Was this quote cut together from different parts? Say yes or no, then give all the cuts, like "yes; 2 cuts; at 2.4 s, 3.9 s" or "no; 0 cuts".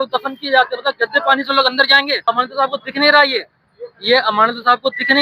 yes; 1 cut; at 2.2 s